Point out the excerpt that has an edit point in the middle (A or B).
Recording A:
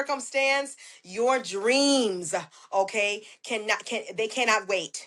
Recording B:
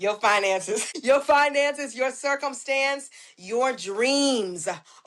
B